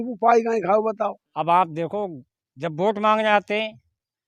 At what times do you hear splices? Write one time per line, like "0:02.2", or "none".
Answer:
0:01.3